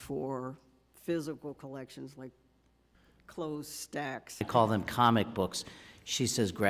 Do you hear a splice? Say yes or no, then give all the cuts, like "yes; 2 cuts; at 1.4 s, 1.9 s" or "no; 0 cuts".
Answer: yes; 1 cut; at 4.5 s